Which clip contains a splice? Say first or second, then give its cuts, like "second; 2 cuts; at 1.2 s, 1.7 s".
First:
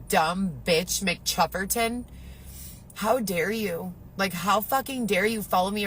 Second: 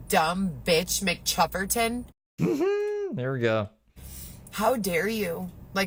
first; 1 cut; at 2.2 s